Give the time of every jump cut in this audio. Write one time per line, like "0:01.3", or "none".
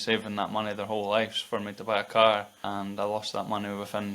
0:02.5